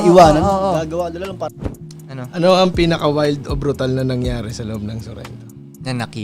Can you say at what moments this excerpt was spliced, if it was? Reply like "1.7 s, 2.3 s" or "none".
1.5 s